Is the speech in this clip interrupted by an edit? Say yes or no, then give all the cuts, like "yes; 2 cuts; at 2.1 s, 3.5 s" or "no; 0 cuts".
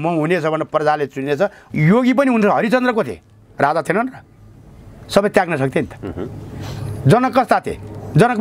yes; 1 cut; at 1.6 s